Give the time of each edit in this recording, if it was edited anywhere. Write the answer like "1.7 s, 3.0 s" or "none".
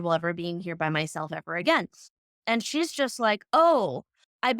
2.4 s

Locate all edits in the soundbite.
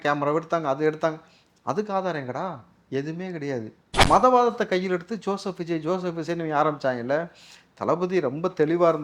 4.0 s

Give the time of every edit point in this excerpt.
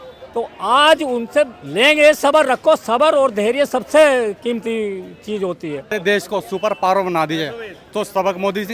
5.9 s

